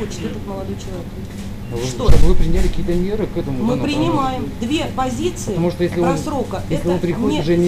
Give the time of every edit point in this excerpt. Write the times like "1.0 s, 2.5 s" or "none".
none

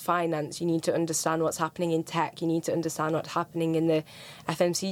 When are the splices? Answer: none

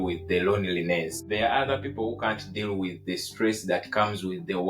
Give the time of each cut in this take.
1.2 s

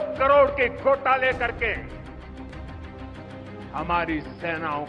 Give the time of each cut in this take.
none

